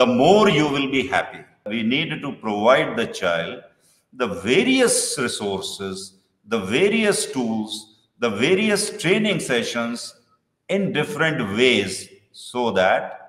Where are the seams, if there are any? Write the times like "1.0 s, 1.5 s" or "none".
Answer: 1.7 s